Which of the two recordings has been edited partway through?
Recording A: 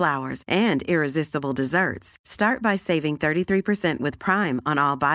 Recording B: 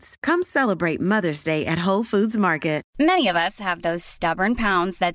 B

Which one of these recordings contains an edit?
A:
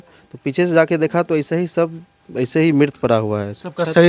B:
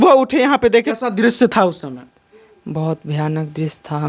B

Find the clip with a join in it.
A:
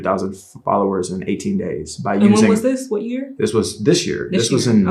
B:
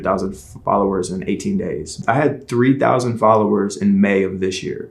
B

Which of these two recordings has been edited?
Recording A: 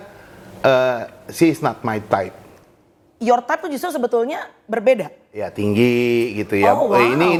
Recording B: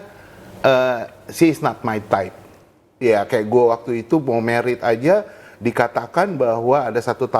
B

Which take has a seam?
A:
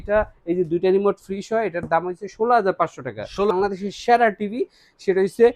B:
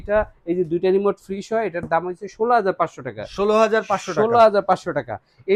A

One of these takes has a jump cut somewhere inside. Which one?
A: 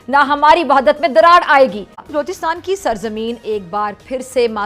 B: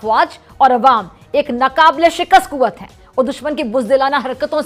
A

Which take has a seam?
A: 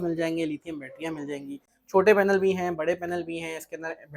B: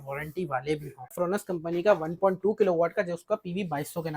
B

